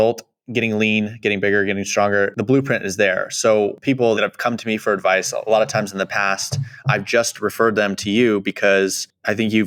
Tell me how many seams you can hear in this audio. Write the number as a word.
zero